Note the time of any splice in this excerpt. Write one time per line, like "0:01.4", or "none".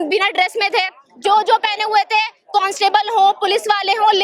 none